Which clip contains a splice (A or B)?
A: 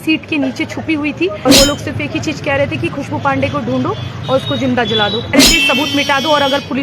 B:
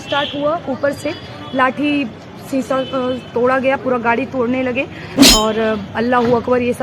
A